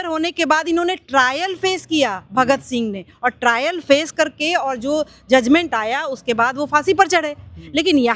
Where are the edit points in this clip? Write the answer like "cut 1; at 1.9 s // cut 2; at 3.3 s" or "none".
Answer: none